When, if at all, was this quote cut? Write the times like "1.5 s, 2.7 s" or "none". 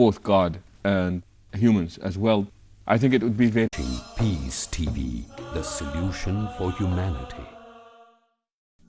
none